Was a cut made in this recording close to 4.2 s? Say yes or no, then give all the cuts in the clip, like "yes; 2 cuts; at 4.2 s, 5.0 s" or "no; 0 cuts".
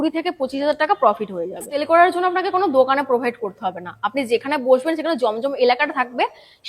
no; 1 cut; at 1.7 s